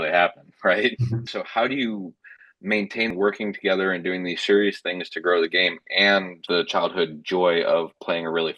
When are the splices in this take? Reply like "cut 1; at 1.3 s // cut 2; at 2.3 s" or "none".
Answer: cut 1; at 1.3 s // cut 2; at 3.1 s // cut 3; at 6.4 s